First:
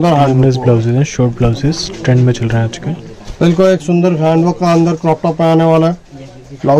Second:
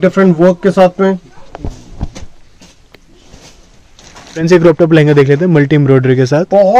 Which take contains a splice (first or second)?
second